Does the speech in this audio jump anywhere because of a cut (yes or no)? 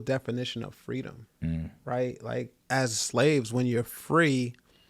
yes